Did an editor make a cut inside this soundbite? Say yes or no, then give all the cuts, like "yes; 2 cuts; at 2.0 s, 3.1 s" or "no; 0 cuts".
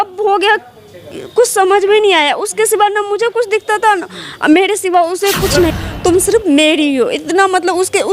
yes; 1 cut; at 5.7 s